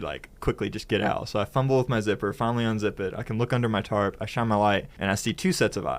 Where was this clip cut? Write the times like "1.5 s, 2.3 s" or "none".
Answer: 4.9 s

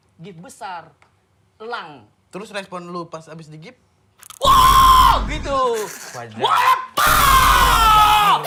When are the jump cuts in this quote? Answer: none

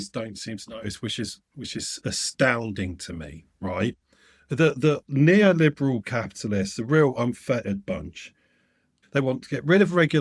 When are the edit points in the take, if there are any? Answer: 9.0 s

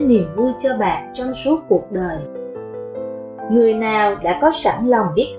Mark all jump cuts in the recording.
2.2 s, 3.5 s

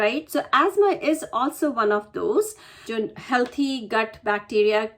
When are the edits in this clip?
2.7 s

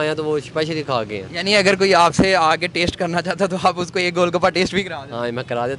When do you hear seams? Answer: none

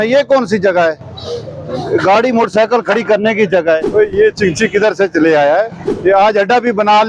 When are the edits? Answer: 3.9 s, 5.8 s

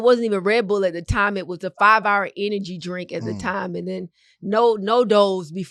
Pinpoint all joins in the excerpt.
none

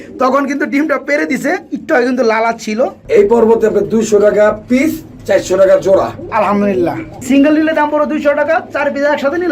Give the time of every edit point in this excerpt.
3.0 s, 7.1 s

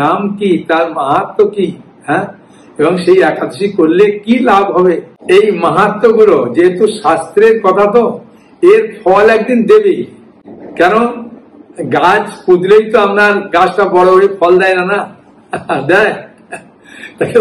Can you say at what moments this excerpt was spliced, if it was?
5.1 s

